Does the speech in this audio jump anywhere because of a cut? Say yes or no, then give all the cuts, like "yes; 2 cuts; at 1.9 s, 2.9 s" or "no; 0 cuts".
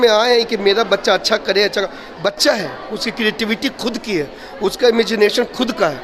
no; 0 cuts